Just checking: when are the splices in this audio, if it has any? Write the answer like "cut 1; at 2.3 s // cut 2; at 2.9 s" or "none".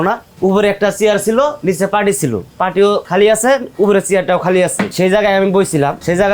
cut 1; at 1.6 s // cut 2; at 3.0 s // cut 3; at 4.8 s